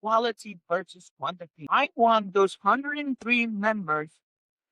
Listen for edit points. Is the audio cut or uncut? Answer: cut